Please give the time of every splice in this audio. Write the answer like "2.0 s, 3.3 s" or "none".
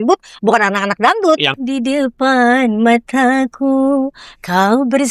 1.6 s